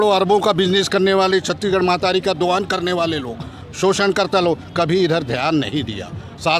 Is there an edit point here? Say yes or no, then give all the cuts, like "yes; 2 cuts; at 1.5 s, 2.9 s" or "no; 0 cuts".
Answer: no; 0 cuts